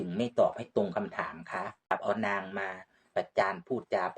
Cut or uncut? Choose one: cut